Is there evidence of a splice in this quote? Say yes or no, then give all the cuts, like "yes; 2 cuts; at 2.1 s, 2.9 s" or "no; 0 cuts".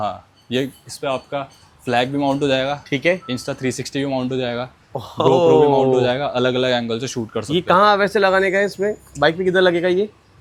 no; 0 cuts